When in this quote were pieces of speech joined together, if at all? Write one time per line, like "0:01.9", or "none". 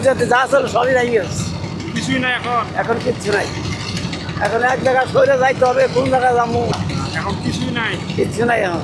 0:06.8